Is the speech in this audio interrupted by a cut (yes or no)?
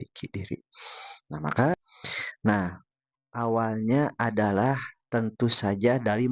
yes